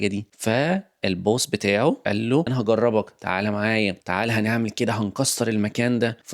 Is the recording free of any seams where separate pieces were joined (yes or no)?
no